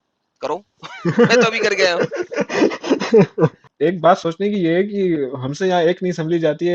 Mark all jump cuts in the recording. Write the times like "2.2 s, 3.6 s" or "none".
3.6 s